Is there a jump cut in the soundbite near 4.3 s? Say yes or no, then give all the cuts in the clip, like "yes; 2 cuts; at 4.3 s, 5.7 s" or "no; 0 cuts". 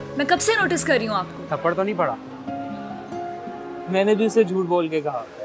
no; 1 cut; at 1.4 s